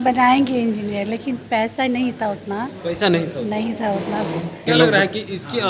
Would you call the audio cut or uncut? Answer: cut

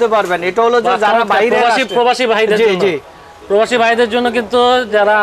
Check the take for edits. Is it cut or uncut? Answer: uncut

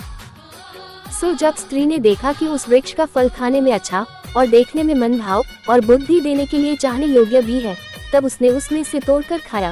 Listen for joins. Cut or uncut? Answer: cut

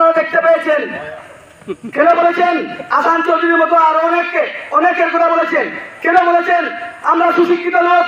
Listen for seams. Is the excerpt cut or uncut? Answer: cut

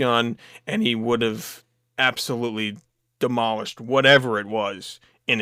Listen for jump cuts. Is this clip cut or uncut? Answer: uncut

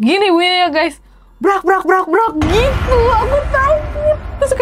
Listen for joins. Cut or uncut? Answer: uncut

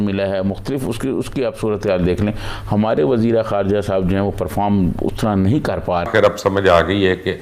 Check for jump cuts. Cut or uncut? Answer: cut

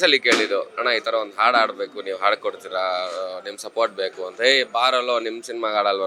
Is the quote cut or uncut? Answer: uncut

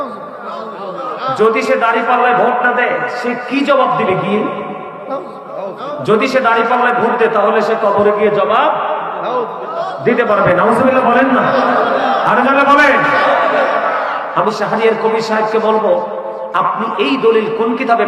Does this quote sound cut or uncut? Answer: uncut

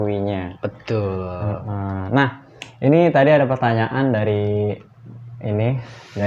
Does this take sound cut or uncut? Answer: uncut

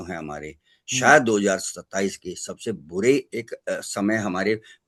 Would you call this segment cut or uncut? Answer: uncut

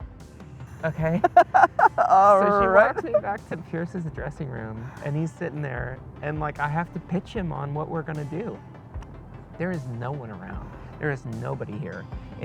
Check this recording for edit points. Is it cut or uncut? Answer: uncut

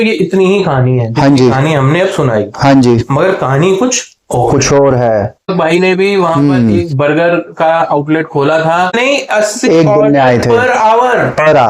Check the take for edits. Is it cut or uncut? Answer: cut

